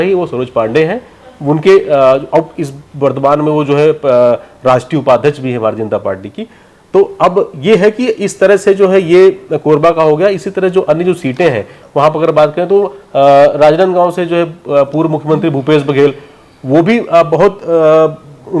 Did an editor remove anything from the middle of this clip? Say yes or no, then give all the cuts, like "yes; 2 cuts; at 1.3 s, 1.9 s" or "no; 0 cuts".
no; 0 cuts